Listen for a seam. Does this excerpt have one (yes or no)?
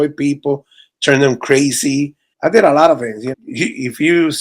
yes